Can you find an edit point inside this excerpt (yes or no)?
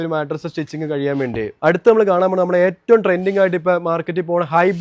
no